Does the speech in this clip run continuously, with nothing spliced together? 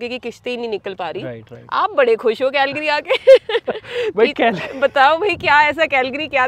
yes; 0 cuts

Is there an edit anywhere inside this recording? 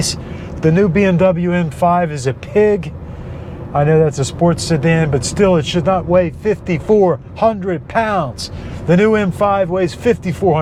no; 0 cuts

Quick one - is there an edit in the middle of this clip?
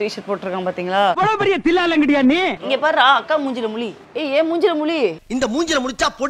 yes; 2 cuts; at 2.6 s, 5.3 s

